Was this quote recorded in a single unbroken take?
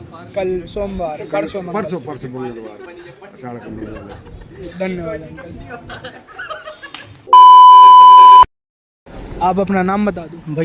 yes; 0 cuts

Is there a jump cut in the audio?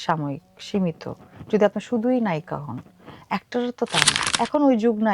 yes; 1 cut; at 4.2 s

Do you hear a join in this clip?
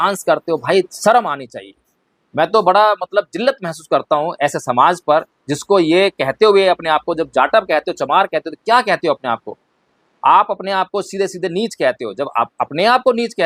no; 0 cuts

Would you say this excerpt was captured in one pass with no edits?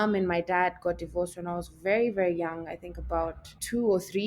yes; 0 cuts

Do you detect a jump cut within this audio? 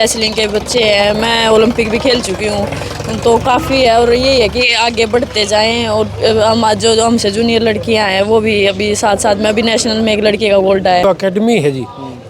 yes; 1 cut; at 11.0 s

